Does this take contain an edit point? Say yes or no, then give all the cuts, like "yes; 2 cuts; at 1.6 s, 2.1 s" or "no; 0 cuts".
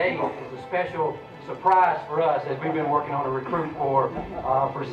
no; 0 cuts